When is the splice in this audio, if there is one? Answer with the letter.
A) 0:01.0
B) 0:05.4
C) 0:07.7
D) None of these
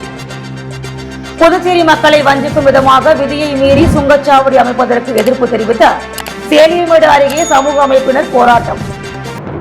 D